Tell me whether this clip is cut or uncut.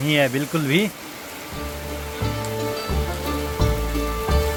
uncut